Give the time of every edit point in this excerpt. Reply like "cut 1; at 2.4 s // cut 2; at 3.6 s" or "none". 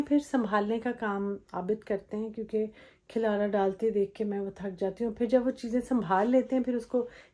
none